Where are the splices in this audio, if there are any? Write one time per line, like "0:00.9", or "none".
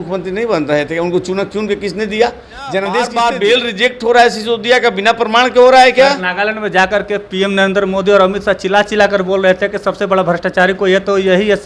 0:03.1